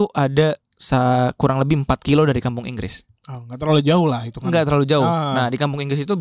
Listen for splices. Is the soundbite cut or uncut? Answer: uncut